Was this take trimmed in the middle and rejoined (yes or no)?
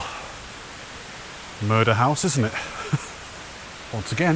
no